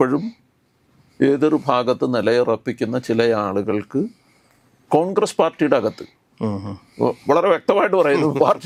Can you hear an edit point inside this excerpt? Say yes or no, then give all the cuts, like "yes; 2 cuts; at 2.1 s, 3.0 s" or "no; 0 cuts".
no; 0 cuts